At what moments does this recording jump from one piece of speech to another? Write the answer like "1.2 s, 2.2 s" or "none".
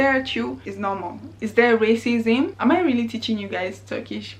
1.4 s, 2.5 s